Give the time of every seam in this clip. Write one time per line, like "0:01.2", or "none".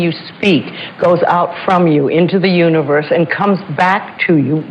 none